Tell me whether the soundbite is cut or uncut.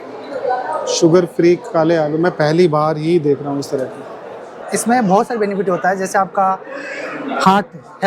cut